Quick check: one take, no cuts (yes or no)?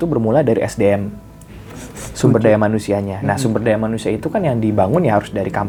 yes